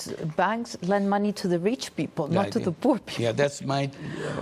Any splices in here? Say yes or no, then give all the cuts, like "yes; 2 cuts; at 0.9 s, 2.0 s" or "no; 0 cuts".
no; 0 cuts